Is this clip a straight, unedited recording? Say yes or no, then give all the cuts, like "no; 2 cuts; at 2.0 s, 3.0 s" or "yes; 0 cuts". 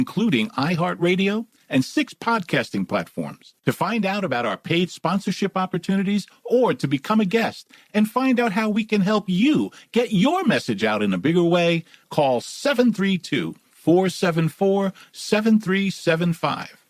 yes; 0 cuts